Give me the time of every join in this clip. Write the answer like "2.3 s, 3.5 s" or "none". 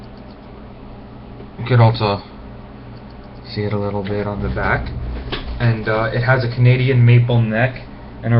3.9 s